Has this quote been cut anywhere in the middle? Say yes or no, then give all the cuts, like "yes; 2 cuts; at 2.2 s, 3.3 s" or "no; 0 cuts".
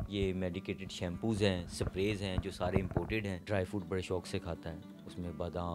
yes; 1 cut; at 3.4 s